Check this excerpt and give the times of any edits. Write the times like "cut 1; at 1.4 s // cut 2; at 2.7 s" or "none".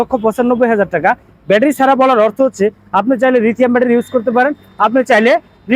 none